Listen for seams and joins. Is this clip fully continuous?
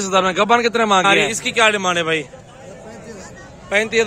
no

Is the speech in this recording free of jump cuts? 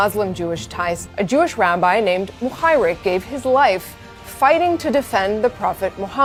yes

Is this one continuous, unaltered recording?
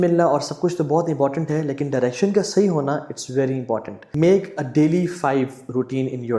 no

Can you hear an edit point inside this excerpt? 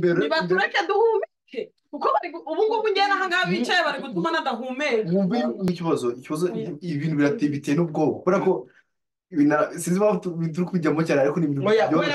yes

